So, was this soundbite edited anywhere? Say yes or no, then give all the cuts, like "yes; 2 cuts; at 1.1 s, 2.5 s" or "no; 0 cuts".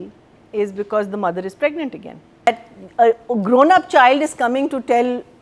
yes; 1 cut; at 2.5 s